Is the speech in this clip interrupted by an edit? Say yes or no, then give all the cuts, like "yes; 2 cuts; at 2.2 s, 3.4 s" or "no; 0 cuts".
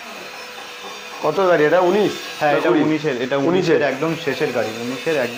no; 0 cuts